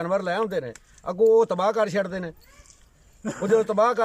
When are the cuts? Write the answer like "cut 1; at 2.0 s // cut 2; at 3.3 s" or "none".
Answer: none